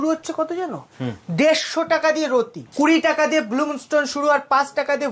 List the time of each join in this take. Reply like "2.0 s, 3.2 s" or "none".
2.6 s